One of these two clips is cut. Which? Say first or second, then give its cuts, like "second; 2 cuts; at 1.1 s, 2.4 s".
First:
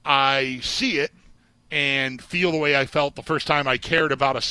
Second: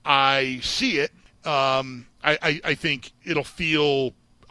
second; 2 cuts; at 1.3 s, 3.1 s